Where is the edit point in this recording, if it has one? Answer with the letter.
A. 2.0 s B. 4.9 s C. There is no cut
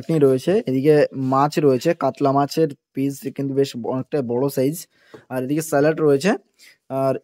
C